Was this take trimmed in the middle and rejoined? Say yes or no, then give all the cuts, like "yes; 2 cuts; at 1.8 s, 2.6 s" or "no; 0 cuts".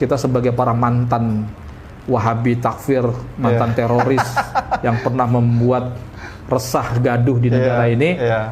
no; 0 cuts